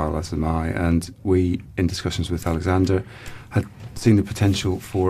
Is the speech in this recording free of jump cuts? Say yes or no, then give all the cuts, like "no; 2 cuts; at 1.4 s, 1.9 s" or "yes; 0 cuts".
yes; 0 cuts